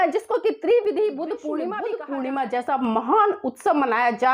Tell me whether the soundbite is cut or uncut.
cut